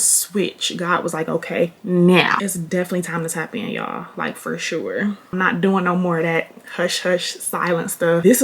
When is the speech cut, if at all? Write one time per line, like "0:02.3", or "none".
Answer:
0:02.4
0:05.3